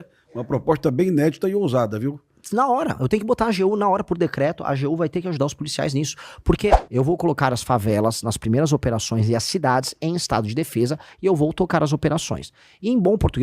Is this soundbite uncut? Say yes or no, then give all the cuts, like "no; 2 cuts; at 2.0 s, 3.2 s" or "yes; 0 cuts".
no; 1 cut; at 6.8 s